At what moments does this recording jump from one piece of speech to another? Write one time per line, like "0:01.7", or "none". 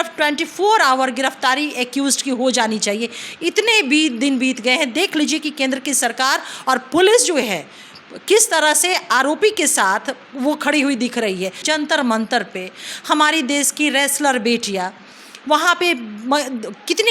0:11.6